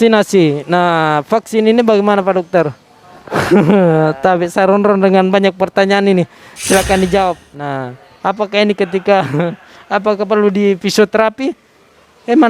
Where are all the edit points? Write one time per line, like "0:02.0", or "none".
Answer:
0:07.5